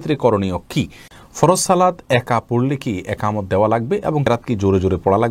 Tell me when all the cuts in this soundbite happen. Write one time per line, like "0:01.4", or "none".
0:01.1
0:04.3